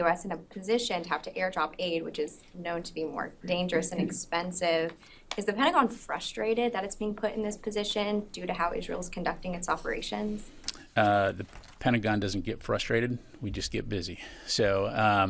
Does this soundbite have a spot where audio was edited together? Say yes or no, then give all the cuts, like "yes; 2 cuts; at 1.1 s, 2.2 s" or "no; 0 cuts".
yes; 3 cuts; at 4.0 s, 8.9 s, 13.9 s